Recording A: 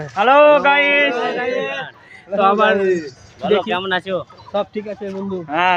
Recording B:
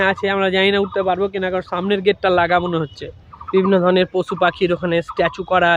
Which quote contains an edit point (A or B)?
B